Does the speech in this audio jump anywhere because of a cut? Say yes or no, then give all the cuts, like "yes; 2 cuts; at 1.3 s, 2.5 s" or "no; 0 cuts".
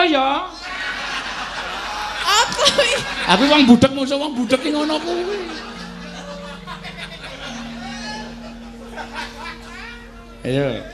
no; 0 cuts